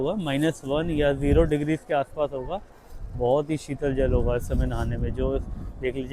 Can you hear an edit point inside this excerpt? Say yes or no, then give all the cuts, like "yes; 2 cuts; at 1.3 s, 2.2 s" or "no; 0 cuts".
no; 0 cuts